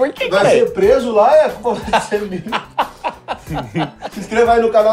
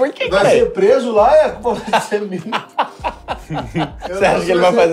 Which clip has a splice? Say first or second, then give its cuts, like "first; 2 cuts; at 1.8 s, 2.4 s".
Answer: first; 1 cut; at 4.0 s